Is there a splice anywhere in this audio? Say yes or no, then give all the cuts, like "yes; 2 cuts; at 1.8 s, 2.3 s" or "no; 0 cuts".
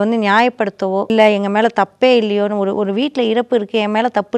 yes; 1 cut; at 1.1 s